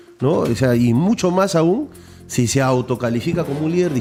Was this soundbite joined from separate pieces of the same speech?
no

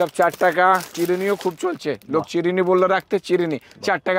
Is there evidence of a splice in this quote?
yes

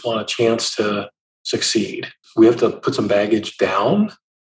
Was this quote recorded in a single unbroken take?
no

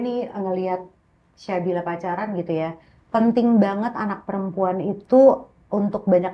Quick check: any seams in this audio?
no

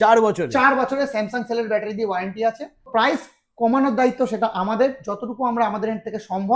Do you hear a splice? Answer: yes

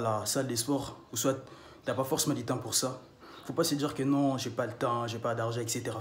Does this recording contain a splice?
no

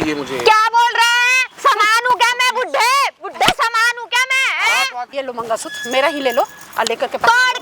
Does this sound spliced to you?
yes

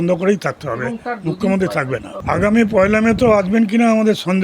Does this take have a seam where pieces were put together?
yes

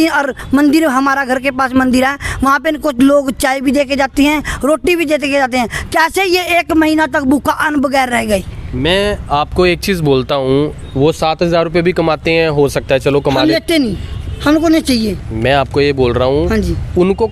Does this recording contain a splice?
no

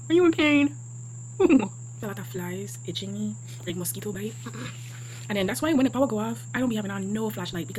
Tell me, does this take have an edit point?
no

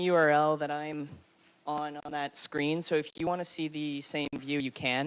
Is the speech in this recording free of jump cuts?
yes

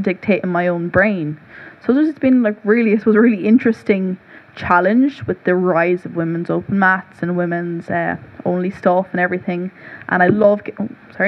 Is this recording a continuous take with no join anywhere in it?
yes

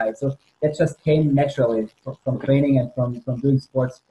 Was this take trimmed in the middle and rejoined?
no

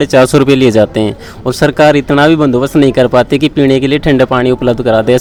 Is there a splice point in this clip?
no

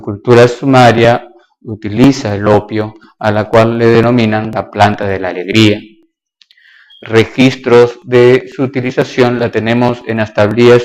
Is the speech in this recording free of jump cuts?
yes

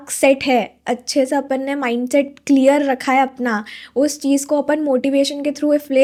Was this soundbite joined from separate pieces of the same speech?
no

